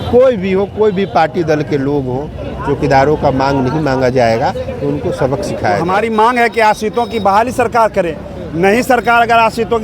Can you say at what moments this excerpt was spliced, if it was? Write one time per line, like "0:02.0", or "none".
0:05.8